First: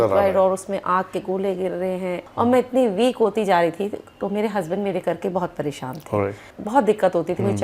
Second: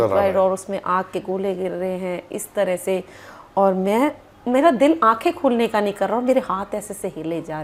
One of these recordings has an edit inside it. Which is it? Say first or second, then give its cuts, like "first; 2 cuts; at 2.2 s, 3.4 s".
first; 2 cuts; at 2.2 s, 6.5 s